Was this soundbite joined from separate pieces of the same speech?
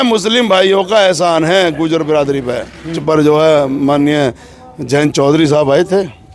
yes; 1 cut; at 3.0 s

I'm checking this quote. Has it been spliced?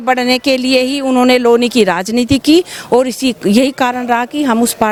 no; 0 cuts

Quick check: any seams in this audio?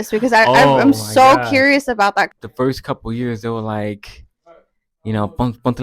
yes; 1 cut; at 2.3 s

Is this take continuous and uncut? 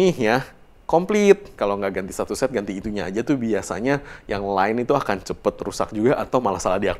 no; 1 cut; at 1.5 s

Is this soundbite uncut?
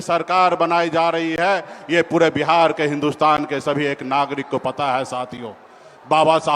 yes; 0 cuts

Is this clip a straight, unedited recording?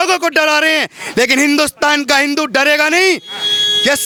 yes; 0 cuts

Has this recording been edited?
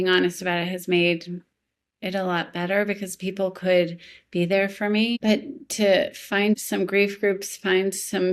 yes; 2 cuts; at 5.2 s, 6.6 s

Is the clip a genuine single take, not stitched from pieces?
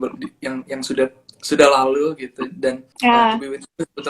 no; 1 cut; at 2.9 s

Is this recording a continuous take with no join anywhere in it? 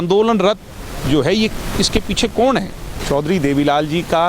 no; 1 cut; at 2.9 s

